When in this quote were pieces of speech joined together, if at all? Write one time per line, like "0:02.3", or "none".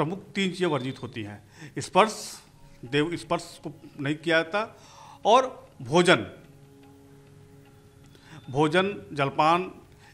none